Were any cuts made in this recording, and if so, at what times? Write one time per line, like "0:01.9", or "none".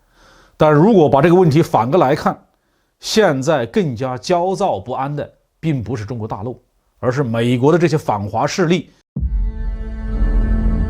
0:09.0

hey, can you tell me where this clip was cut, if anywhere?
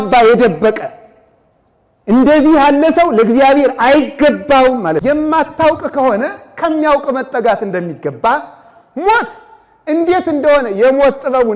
0:05.0

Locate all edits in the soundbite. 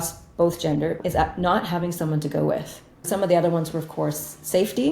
0:01.0
0:03.0

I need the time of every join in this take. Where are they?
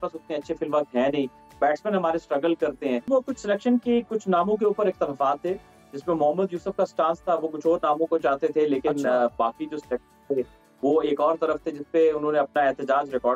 0:03.1

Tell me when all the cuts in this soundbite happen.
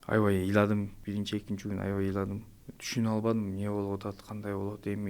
0:01.0

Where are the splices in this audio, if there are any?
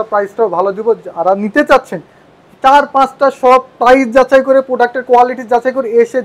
none

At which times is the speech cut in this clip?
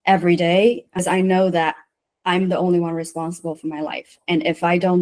0:01.0

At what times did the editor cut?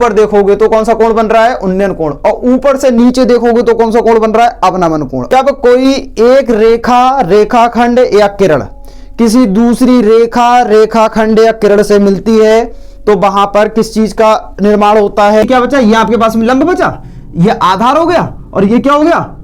0:05.2
0:15.4

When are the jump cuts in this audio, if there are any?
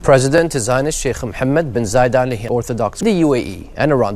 0:02.4

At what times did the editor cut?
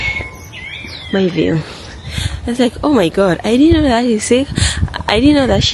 none

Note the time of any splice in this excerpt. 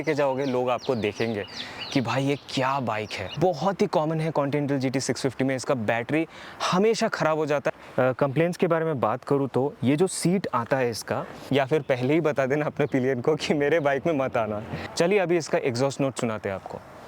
0:03.3
0:07.7
0:11.4
0:14.8

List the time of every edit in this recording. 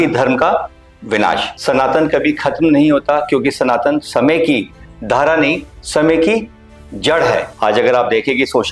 0:01.5
0:07.5

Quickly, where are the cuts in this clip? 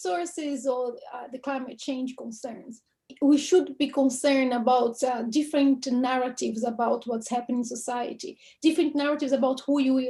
0:03.1

